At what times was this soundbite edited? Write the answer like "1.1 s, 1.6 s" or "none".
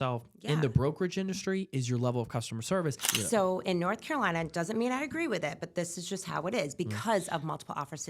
3.1 s